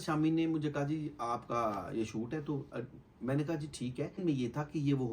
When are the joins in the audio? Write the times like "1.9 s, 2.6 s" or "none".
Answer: 4.2 s